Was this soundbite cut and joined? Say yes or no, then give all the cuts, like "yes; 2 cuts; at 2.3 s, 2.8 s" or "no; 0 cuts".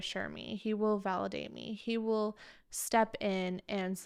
no; 0 cuts